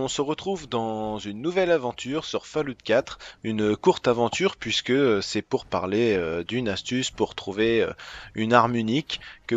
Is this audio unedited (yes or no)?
yes